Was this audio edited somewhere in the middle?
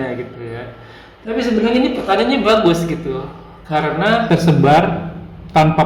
yes; 1 cut; at 4.2 s

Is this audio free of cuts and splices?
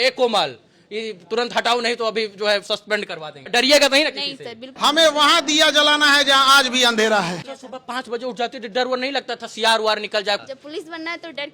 no; 4 cuts; at 3.5 s, 4.7 s, 7.3 s, 10.4 s

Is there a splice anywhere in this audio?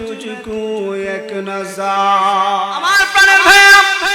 yes; 1 cut; at 3.0 s

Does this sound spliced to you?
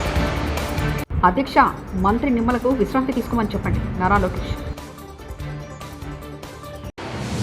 yes; 1 cut; at 0.9 s

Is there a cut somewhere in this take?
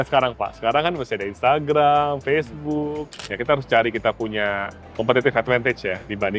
yes; 1 cut; at 3.1 s

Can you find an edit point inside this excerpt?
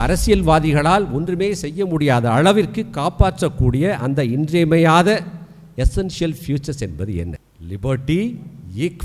yes; 1 cut; at 7.5 s

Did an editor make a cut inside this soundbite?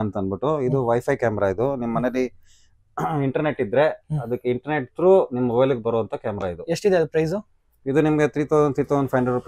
no; 0 cuts

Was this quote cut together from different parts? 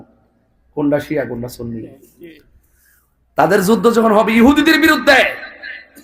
no; 0 cuts

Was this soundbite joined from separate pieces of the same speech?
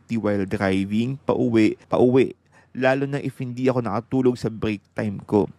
yes; 1 cut; at 1.8 s

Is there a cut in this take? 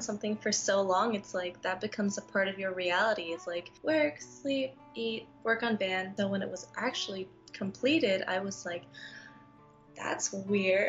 no; 0 cuts

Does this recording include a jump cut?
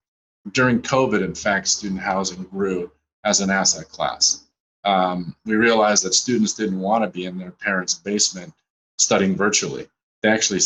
no; 0 cuts

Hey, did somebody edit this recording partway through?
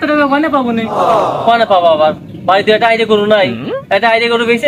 no; 0 cuts

